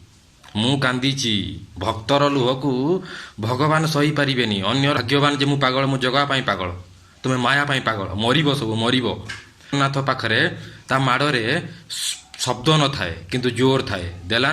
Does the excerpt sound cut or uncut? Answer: cut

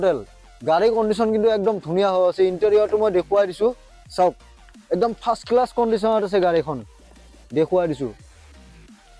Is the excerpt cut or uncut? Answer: cut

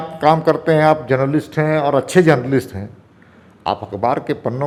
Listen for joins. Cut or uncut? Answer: uncut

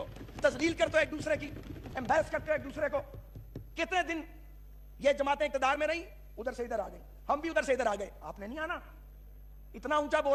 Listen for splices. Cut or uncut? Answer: uncut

